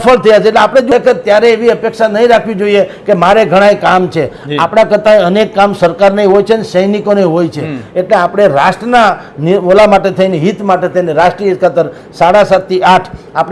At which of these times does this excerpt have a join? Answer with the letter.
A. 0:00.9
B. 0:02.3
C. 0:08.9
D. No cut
A